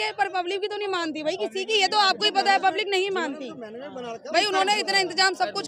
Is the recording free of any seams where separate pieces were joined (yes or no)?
yes